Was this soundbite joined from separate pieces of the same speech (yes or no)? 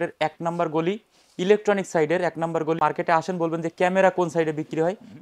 yes